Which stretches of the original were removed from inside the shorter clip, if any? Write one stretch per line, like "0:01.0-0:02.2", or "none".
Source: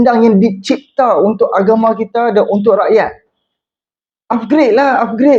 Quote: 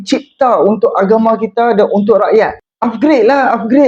0:03.2-0:04.1